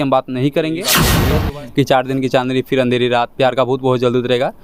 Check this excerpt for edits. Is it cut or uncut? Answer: cut